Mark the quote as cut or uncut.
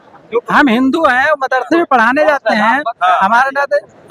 uncut